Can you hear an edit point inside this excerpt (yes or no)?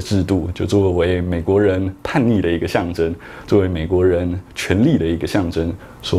no